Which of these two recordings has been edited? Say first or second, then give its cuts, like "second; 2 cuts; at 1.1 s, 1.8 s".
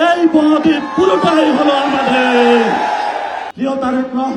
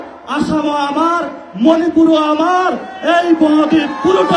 first; 1 cut; at 3.4 s